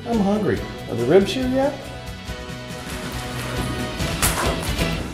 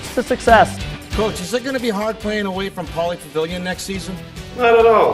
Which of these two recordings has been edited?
first; 1 cut; at 1.8 s

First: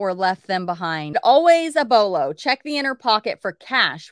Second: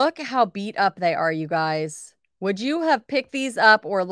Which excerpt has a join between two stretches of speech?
first; 1 cut; at 1.1 s

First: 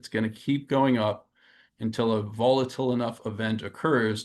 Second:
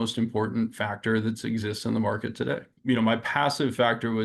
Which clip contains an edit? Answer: second; 1 cut; at 2.7 s

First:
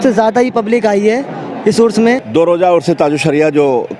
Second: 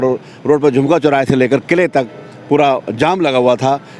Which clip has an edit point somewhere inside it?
first; 1 cut; at 2.2 s

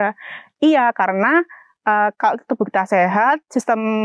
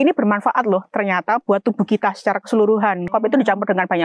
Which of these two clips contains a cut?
second; 1 cut; at 3.1 s

